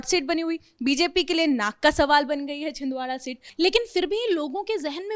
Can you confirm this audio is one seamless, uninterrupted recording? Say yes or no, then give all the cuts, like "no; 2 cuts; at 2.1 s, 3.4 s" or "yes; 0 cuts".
no; 1 cut; at 3.4 s